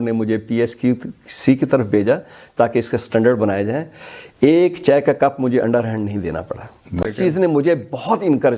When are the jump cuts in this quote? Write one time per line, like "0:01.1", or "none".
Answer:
0:07.0